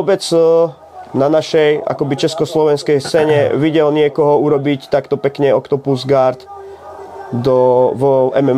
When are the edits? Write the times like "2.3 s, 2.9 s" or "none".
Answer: none